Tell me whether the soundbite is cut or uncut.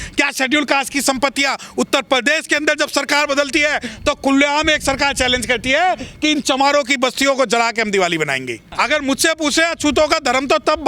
cut